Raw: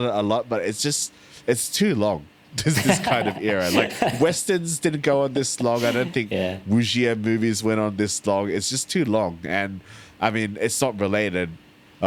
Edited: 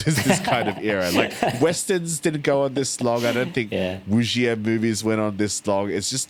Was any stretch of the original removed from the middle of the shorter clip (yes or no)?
no